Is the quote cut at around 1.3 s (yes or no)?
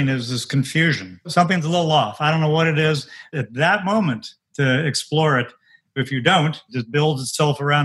yes